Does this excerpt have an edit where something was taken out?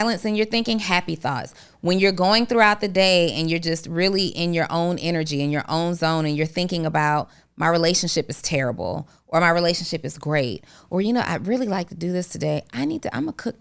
no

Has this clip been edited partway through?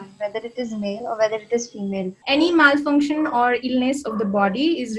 yes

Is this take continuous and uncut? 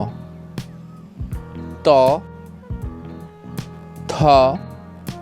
no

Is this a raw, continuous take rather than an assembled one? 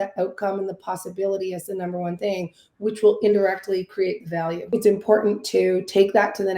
no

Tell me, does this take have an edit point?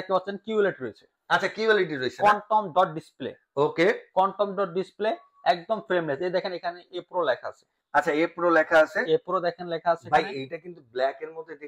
no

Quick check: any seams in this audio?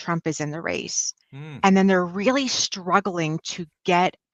no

